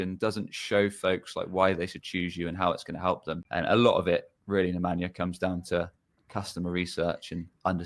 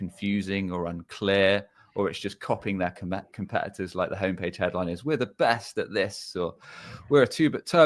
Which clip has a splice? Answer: first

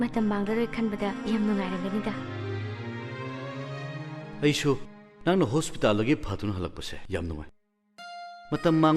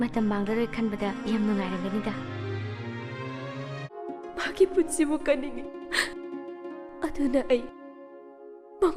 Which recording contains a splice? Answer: second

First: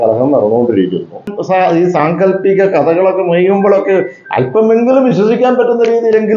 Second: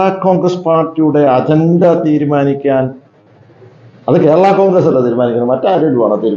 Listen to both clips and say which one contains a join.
first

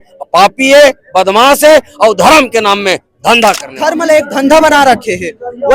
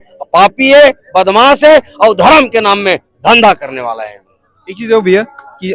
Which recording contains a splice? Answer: first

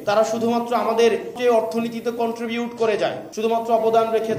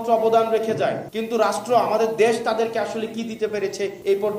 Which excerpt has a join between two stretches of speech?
first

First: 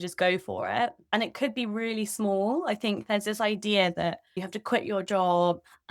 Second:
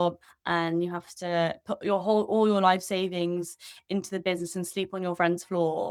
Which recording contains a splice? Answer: first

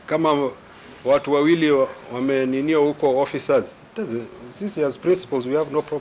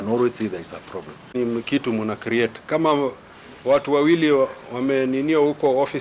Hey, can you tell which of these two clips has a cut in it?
second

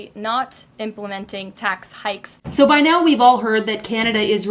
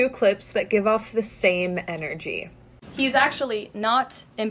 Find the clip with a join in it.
first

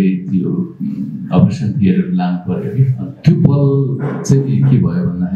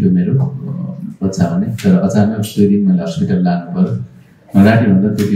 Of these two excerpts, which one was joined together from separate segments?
first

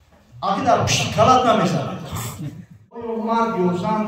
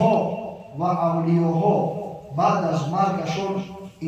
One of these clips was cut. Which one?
first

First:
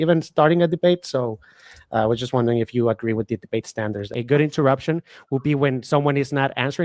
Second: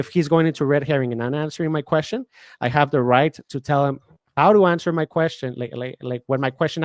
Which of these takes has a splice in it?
first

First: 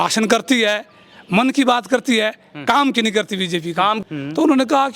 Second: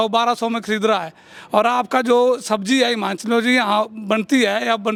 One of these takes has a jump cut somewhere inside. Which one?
first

